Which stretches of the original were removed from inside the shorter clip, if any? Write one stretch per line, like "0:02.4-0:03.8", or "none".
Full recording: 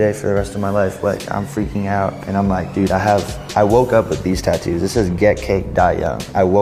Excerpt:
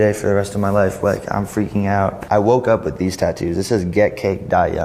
0:02.2-0:03.4